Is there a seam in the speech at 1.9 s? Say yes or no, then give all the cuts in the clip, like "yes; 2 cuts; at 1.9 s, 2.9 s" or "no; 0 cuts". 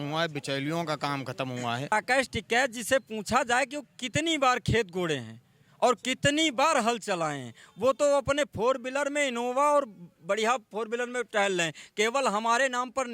yes; 1 cut; at 1.9 s